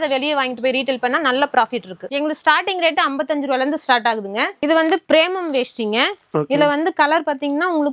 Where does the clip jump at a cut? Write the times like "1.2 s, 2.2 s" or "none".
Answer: 1.9 s, 4.6 s